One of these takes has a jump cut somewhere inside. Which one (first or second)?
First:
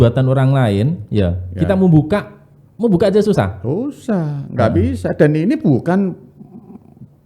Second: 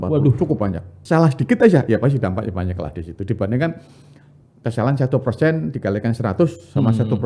second